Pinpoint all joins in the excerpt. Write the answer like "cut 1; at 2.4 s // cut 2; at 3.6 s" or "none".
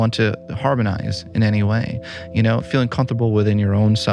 cut 1; at 2.6 s